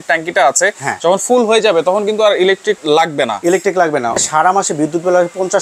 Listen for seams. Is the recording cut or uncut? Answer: cut